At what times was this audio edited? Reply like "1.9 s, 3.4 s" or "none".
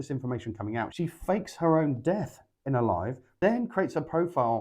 0.9 s, 3.2 s